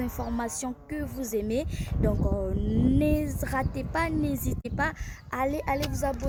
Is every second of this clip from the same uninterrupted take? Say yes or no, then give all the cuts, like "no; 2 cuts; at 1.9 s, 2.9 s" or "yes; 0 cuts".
yes; 0 cuts